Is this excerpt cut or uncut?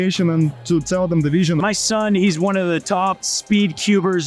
cut